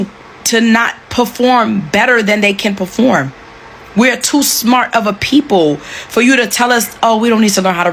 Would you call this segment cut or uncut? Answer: uncut